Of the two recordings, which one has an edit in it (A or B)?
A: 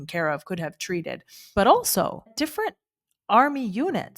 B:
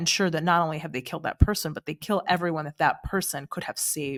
A